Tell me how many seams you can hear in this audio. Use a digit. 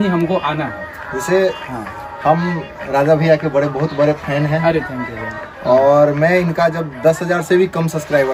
0